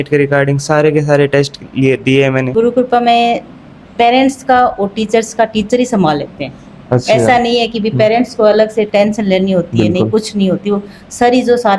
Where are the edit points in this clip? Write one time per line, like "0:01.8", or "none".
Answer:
0:02.5